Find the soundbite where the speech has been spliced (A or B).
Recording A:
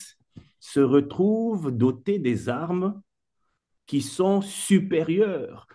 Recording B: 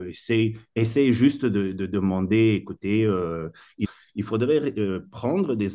B